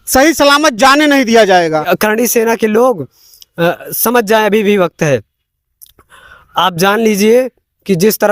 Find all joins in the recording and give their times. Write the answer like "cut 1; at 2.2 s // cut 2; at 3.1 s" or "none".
cut 1; at 1.9 s